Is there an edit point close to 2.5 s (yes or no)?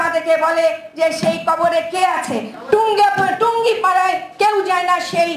yes